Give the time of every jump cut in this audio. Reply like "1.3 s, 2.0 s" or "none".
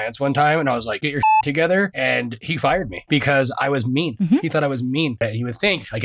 1.0 s, 2.4 s, 4.1 s, 5.2 s